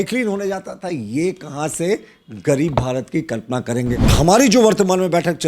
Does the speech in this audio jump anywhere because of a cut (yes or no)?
yes